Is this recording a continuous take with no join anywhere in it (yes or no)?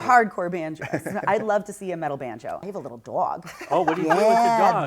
no